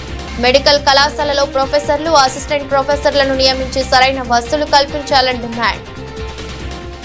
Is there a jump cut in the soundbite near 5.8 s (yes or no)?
yes